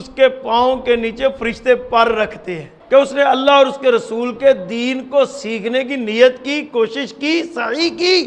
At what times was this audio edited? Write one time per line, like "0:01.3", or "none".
0:02.7

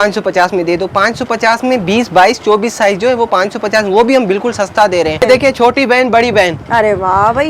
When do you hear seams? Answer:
0:05.2

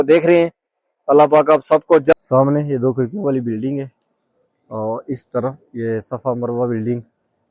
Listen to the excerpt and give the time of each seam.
0:02.1

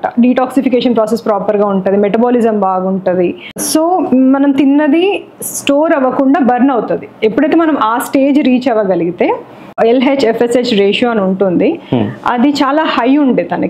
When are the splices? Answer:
0:03.4
0:09.6

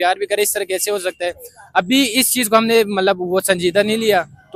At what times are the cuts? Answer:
none

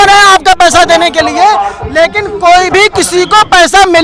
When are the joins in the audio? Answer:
none

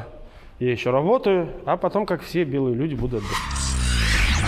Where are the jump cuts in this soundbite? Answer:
0:03.3

